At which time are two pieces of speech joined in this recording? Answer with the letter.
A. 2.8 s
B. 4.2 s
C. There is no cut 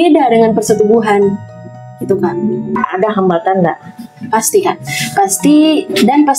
A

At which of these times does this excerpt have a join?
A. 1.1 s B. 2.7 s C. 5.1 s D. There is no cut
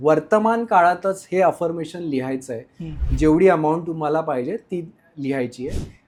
D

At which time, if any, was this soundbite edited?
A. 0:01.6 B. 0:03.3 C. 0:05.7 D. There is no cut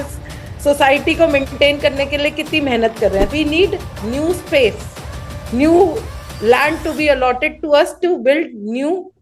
B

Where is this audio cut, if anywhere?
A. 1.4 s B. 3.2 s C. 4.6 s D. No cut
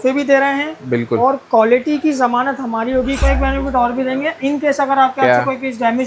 B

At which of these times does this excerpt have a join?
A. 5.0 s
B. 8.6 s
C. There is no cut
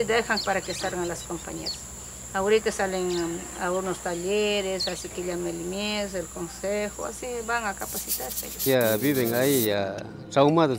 B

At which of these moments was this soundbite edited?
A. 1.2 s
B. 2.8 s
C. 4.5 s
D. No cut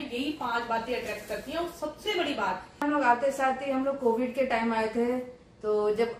B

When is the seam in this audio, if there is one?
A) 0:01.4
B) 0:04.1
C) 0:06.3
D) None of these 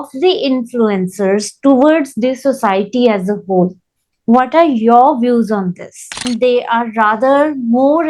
C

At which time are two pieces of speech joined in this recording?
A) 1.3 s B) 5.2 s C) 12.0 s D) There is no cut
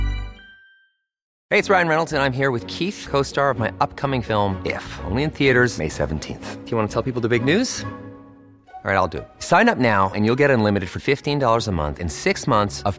A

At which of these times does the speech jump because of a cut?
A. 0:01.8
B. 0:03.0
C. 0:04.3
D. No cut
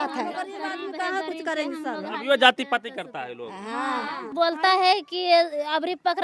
C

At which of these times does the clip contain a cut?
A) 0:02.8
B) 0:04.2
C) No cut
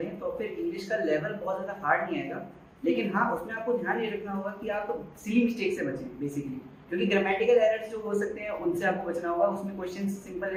C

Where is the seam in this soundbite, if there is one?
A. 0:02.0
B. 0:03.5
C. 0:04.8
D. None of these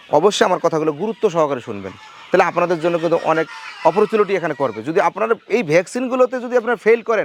D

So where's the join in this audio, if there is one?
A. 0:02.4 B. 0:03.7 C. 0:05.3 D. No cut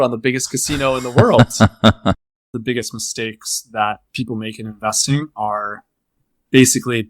A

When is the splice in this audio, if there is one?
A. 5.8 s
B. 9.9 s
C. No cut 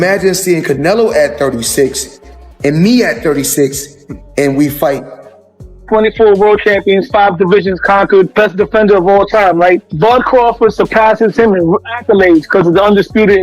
A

